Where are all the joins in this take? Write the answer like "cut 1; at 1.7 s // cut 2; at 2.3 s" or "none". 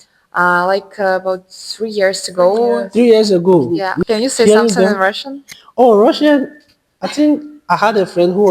cut 1; at 3.8 s